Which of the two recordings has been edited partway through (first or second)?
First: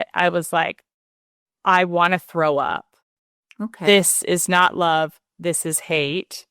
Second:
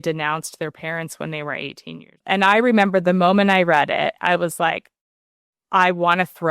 second